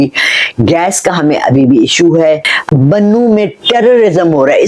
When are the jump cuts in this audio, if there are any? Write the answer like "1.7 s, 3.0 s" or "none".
2.5 s